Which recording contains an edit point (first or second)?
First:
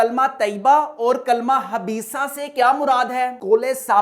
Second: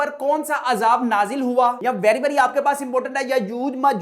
second